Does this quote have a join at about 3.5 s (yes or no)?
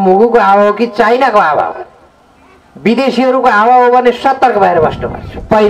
no